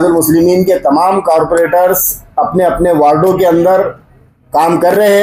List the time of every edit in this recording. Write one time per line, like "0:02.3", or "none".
none